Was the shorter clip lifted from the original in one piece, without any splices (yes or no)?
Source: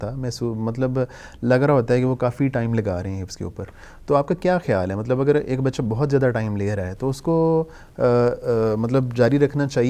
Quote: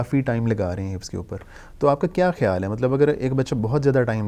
yes